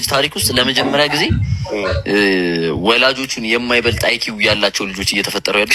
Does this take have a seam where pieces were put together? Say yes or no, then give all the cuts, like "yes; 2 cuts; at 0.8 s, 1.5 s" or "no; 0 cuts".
no; 0 cuts